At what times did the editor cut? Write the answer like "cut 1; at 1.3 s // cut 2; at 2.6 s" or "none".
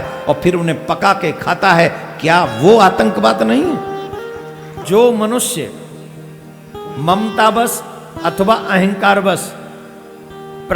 cut 1; at 4.8 s